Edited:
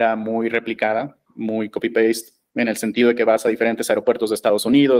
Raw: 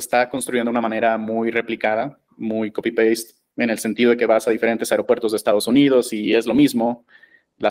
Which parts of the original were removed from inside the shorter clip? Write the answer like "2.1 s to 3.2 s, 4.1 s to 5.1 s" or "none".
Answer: none